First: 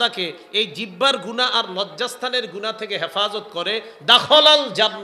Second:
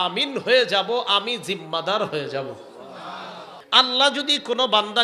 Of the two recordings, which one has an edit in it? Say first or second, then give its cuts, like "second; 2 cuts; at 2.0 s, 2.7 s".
second; 1 cut; at 3.5 s